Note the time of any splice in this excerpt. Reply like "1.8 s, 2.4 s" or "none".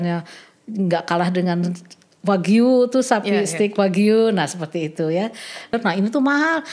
5.7 s